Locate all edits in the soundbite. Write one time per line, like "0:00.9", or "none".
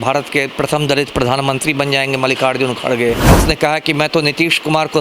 0:03.3